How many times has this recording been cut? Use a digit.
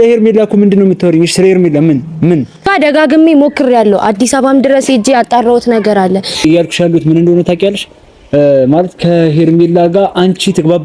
2